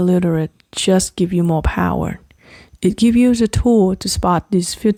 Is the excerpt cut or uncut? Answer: uncut